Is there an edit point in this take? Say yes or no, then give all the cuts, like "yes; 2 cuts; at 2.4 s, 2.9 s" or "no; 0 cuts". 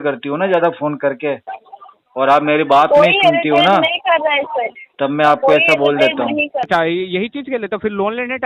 yes; 1 cut; at 6.7 s